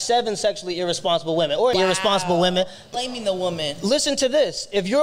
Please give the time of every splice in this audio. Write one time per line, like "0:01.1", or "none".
0:01.7
0:02.9